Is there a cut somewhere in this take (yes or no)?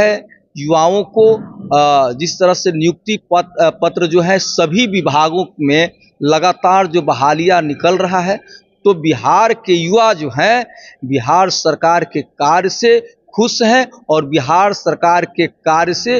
no